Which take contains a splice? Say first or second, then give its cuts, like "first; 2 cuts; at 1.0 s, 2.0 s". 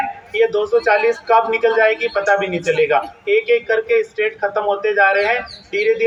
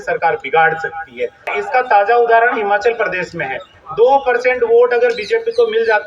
second; 1 cut; at 1.5 s